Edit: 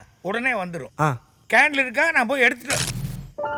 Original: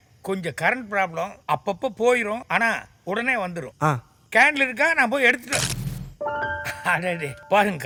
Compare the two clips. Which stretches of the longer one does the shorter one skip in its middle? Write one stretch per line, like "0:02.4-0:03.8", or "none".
none